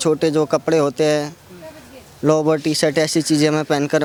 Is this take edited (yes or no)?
no